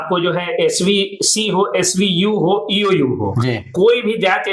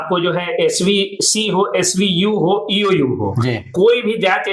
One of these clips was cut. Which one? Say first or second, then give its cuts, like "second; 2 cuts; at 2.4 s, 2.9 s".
second; 2 cuts; at 1.1 s, 3.8 s